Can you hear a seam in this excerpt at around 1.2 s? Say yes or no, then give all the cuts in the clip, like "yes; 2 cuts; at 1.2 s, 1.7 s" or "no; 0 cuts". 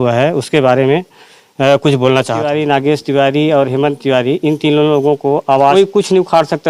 no; 2 cuts; at 2.5 s, 5.7 s